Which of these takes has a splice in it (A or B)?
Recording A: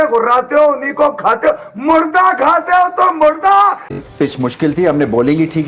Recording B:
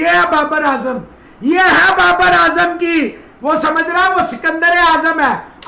A